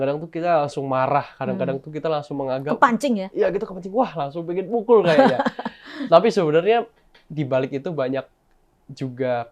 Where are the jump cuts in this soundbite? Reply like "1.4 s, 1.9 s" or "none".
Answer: none